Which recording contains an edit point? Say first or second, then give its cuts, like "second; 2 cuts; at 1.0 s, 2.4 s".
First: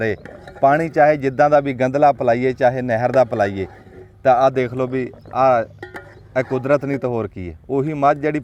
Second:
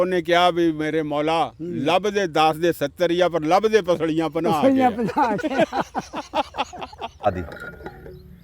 second; 1 cut; at 7.3 s